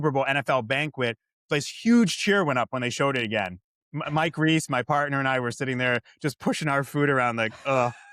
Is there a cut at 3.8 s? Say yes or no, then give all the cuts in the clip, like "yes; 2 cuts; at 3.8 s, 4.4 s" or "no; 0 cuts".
yes; 1 cut; at 3.8 s